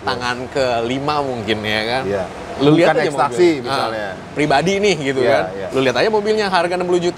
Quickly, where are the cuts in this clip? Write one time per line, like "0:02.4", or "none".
none